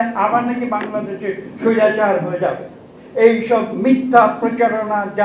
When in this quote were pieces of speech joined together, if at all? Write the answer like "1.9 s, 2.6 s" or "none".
none